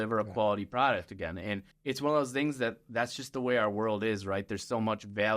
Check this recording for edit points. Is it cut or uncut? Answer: cut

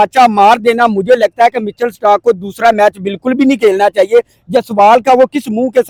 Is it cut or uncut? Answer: uncut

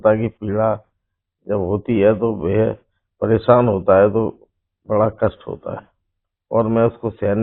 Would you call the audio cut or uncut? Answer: uncut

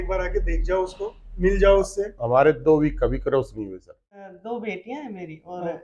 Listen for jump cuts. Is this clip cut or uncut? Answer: cut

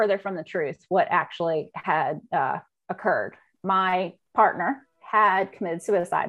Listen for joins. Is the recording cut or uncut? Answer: uncut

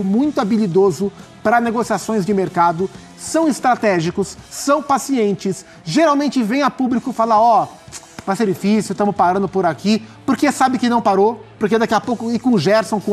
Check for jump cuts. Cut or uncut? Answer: uncut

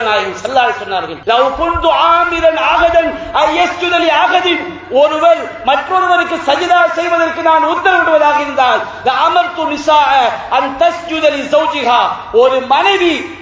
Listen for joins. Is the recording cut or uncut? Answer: cut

